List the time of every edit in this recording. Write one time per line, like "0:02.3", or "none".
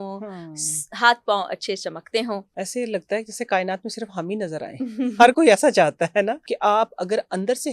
0:02.5
0:06.4